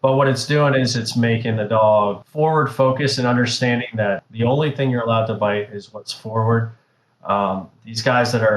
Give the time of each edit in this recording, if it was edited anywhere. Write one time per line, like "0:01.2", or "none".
0:02.2
0:04.3